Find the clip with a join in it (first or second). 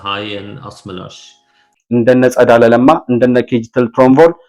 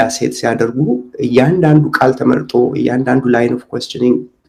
first